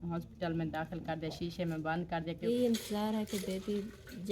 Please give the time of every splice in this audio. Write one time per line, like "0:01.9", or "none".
0:02.5